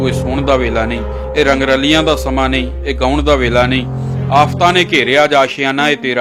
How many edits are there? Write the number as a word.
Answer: zero